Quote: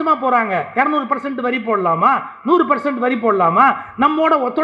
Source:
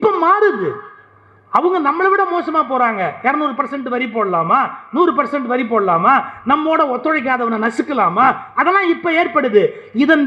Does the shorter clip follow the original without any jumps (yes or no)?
yes